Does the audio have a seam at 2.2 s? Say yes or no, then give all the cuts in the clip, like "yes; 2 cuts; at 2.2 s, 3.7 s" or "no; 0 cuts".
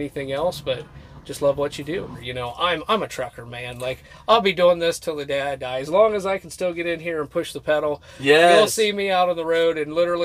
yes; 1 cut; at 2.2 s